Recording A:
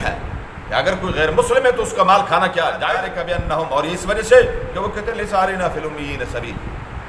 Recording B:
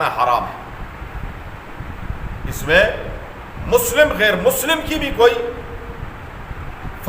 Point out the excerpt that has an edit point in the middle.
A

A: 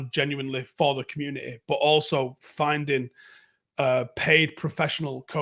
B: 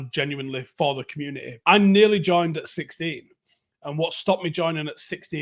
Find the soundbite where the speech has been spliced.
B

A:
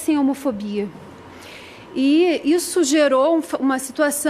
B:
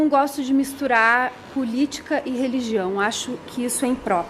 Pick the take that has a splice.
A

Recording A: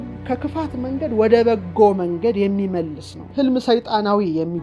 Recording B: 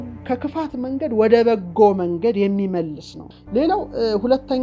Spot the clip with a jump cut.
A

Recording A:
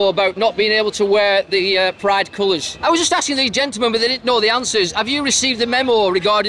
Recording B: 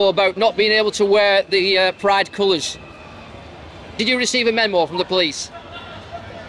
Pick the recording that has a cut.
A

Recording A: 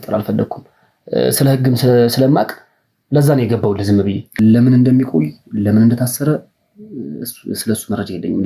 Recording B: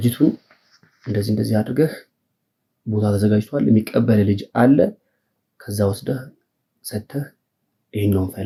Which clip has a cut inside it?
A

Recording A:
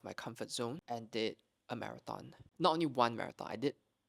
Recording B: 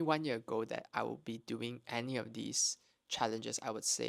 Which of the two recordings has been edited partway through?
A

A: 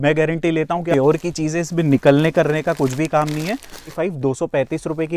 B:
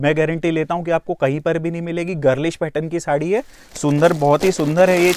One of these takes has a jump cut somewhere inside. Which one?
A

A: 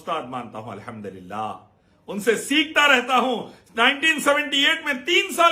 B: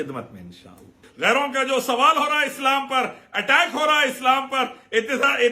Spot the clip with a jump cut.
B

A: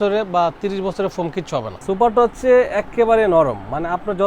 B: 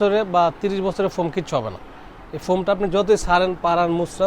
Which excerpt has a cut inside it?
A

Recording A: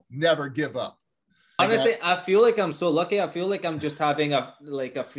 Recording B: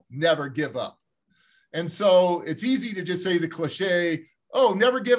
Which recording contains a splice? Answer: A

